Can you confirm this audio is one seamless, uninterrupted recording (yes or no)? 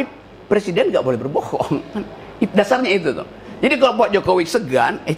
yes